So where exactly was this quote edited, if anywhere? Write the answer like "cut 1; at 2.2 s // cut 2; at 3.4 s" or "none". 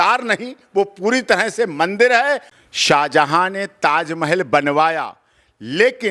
cut 1; at 2.5 s